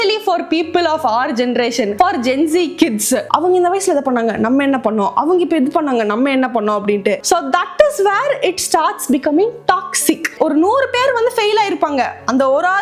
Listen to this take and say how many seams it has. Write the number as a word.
two